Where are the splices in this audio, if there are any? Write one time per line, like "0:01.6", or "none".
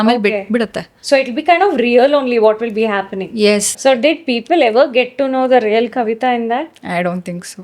0:03.7